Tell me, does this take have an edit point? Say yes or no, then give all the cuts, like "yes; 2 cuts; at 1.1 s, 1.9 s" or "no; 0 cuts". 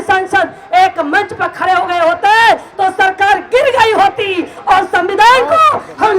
no; 0 cuts